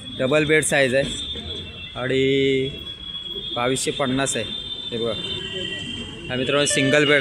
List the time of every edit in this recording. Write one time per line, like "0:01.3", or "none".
0:05.3